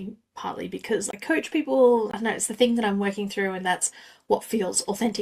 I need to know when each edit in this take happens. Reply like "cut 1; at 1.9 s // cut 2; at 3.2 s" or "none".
cut 1; at 1.1 s // cut 2; at 2.1 s